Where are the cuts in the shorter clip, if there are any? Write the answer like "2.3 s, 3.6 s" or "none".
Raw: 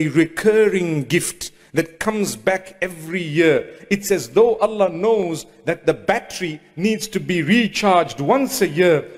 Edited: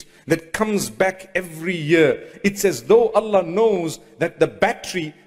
none

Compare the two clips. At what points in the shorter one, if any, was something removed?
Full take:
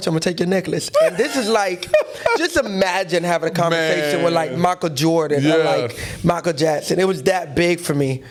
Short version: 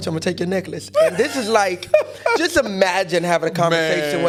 none

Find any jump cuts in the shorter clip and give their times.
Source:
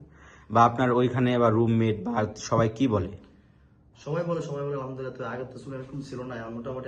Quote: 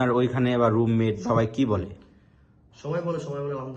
1.2 s

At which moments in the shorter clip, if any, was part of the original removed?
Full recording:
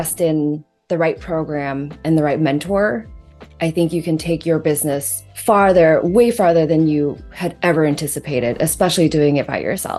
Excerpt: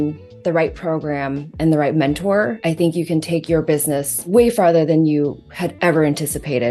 2.6 s, 4.3 s

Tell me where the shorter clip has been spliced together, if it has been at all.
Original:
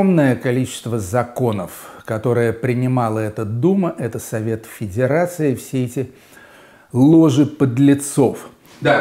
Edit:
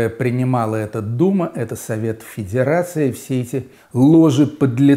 3.8 s

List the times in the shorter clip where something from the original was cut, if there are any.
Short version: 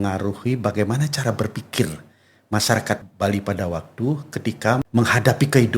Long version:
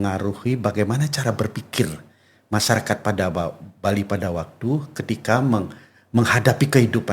3.0 s, 4.8 s

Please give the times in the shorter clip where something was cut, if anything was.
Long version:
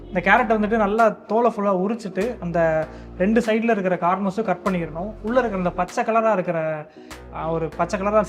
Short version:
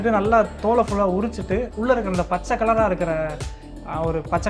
1.7 s

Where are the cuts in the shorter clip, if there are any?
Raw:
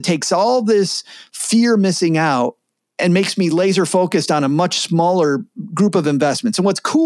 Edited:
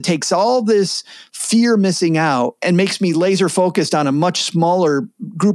2.6 s

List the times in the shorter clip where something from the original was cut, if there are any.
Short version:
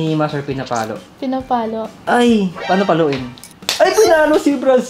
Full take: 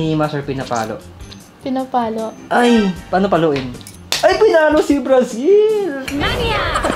1.0 s

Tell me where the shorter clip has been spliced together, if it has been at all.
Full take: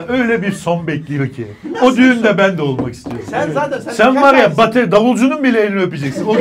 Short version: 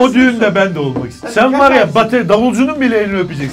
1.2 s

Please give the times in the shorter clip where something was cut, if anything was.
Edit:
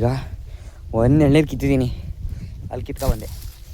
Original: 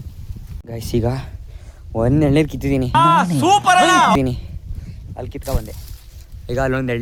1.8 s

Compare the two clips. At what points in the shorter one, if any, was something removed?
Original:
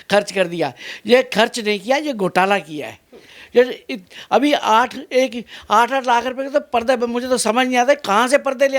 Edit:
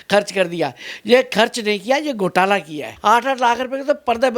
2.8 s

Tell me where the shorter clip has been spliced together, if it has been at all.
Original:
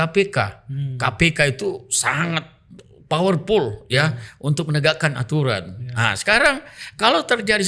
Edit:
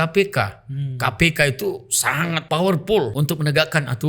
2.4 s, 3.1 s

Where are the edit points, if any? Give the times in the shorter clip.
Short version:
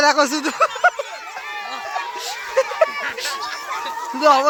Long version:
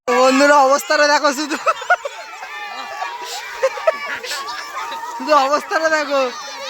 none

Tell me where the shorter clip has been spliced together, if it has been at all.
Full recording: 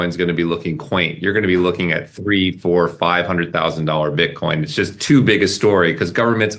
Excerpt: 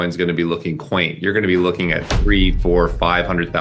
none

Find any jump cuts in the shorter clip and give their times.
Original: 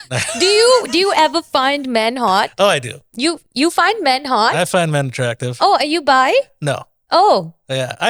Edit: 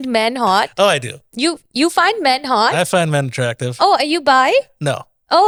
none

